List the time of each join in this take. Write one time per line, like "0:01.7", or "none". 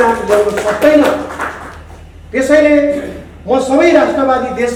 none